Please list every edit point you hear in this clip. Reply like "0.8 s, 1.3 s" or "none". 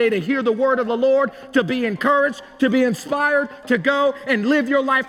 none